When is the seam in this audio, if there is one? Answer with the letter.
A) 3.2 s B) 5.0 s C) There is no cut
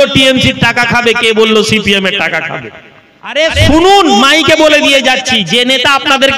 A